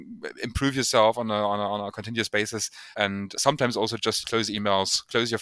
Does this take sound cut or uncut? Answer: cut